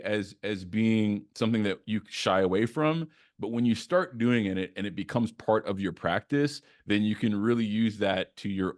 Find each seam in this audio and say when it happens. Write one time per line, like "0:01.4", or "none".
none